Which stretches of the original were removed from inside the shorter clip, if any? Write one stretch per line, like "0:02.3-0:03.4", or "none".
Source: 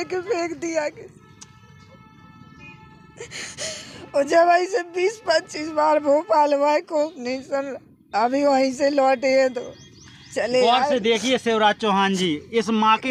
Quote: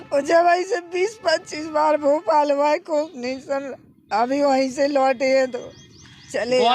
none